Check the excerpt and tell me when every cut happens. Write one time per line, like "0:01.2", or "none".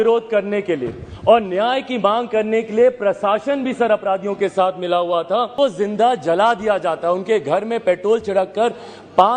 0:05.5